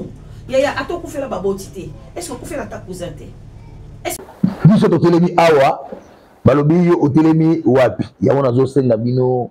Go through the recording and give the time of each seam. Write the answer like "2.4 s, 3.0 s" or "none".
4.2 s